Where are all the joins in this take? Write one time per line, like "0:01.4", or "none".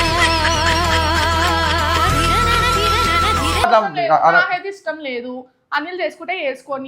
0:03.6